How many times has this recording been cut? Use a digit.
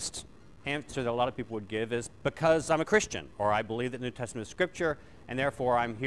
1